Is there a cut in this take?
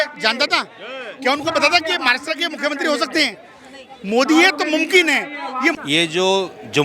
yes; 1 cut; at 5.8 s

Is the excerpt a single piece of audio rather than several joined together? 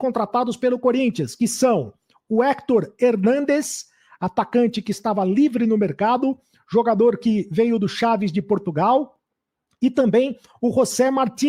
yes; 0 cuts

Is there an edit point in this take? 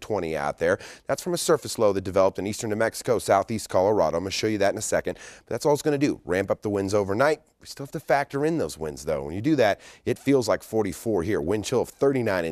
no; 0 cuts

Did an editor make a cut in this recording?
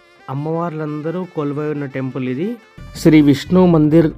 yes; 1 cut; at 2.8 s

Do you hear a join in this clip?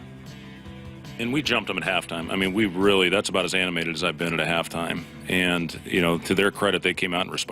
yes; 1 cut; at 1.3 s

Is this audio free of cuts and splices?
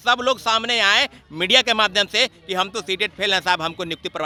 yes; 0 cuts

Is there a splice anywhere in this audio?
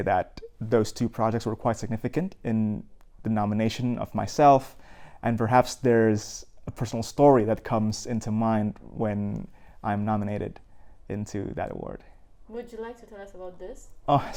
no; 0 cuts

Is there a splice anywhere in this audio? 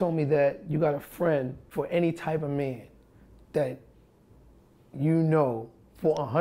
yes; 1 cut; at 1.7 s

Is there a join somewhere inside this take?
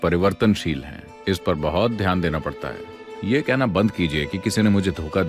yes; 1 cut; at 3.1 s

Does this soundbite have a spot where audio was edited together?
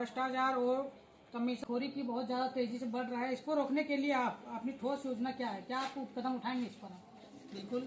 yes; 1 cut; at 1.6 s

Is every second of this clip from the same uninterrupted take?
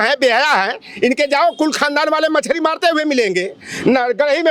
yes; 0 cuts

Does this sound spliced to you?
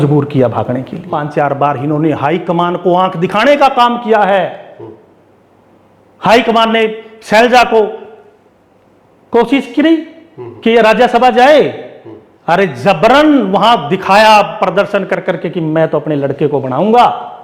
yes; 1 cut; at 1.0 s

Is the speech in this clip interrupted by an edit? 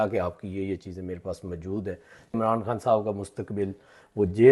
yes; 1 cut; at 2.4 s

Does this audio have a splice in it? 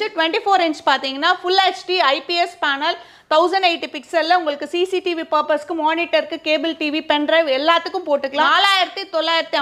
yes; 1 cut; at 8.5 s

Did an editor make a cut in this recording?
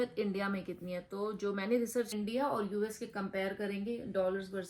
yes; 1 cut; at 2.1 s

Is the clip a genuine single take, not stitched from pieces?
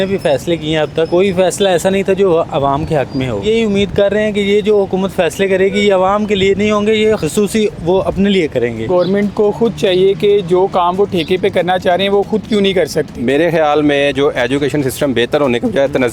no; 5 cuts; at 1.1 s, 3.4 s, 7.2 s, 8.9 s, 13.2 s

